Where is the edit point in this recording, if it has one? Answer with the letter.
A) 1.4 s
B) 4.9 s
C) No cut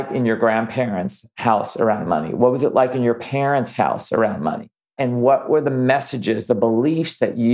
B